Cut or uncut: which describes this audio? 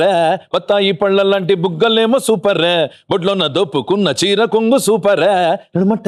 uncut